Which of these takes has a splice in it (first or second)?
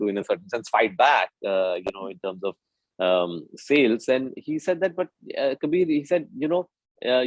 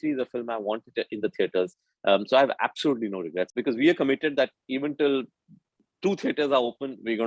second